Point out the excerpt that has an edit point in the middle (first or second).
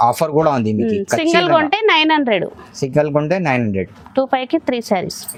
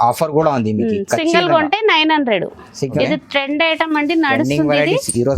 second